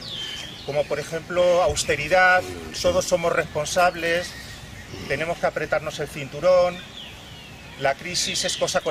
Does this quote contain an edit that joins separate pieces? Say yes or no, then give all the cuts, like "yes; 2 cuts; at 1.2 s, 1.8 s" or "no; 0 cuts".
no; 0 cuts